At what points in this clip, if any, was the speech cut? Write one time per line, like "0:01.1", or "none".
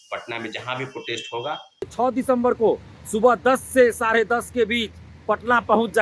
0:01.9